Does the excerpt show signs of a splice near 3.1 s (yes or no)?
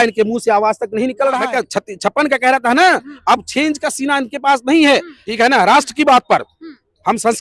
no